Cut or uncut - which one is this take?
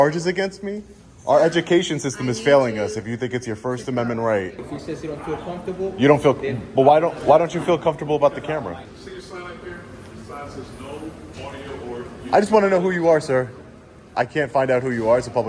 cut